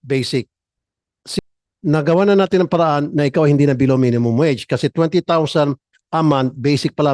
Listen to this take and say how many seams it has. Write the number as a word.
one